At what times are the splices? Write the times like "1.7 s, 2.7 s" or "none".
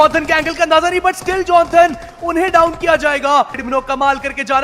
3.6 s